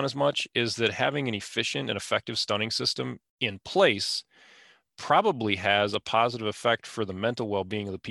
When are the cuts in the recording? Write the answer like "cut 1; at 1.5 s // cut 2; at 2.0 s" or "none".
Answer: cut 1; at 3.2 s